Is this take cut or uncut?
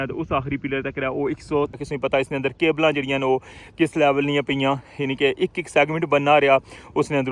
cut